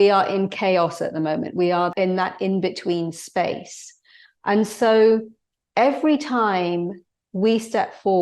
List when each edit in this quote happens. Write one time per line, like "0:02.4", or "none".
0:01.9